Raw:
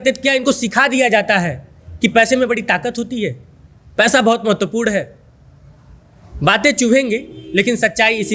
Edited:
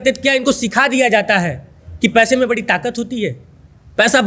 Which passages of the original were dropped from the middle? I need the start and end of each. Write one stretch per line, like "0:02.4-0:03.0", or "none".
none